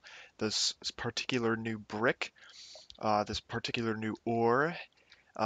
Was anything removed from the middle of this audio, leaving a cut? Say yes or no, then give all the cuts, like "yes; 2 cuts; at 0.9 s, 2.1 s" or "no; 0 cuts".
yes; 1 cut; at 3.7 s